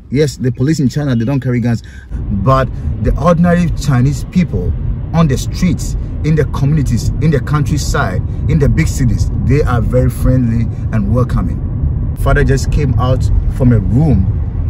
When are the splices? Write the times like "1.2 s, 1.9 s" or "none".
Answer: 2.0 s, 12.2 s